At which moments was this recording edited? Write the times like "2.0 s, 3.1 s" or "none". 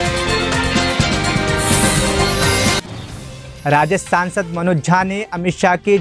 none